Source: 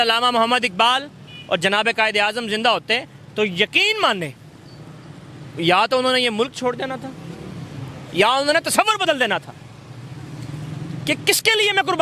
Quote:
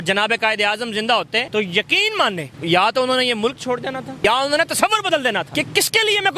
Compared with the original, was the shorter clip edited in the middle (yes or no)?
yes